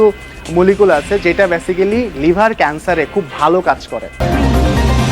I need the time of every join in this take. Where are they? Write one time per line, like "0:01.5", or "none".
0:04.0